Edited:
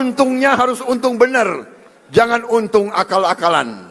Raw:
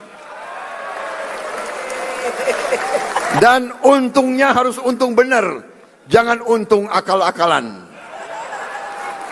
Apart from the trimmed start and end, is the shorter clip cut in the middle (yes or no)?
no